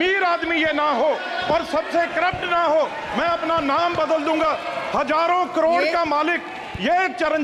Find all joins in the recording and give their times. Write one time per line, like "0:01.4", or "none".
none